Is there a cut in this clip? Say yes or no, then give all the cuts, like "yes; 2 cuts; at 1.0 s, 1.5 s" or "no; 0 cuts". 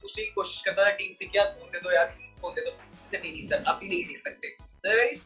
no; 0 cuts